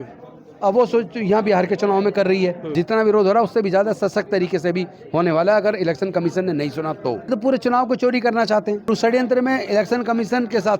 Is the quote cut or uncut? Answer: cut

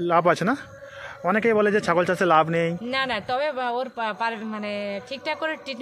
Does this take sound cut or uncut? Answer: uncut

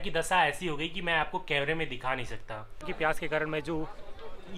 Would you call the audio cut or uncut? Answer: cut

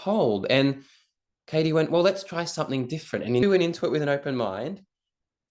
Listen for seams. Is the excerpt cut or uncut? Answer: cut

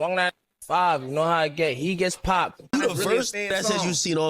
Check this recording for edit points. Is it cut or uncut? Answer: cut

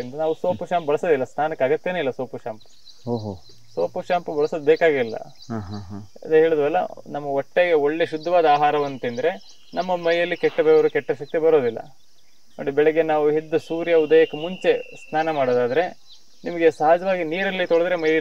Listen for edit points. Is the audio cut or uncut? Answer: uncut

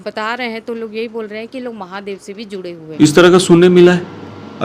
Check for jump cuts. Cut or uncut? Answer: cut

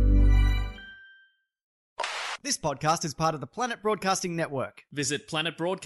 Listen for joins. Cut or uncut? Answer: cut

